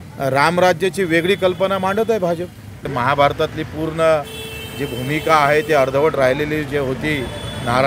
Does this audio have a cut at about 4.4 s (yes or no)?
no